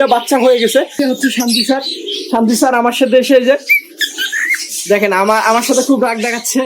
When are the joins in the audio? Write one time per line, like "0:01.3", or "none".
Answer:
0:01.0